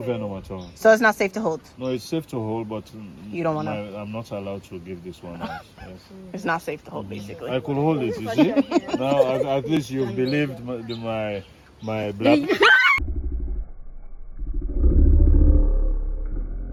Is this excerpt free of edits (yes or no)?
yes